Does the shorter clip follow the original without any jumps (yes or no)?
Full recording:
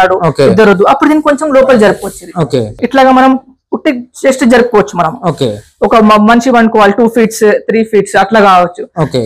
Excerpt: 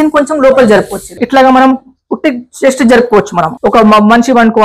no